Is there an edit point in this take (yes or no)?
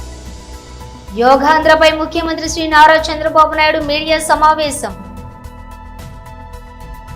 yes